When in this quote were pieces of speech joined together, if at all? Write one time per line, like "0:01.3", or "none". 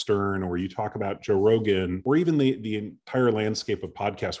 0:02.0